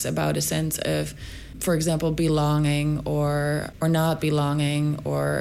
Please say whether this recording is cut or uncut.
cut